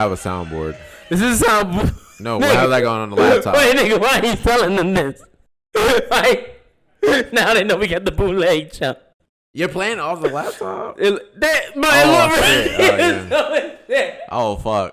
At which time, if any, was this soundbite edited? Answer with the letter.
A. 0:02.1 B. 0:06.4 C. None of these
C